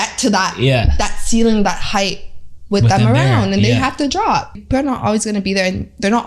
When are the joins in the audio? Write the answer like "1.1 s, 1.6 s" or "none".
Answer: 4.6 s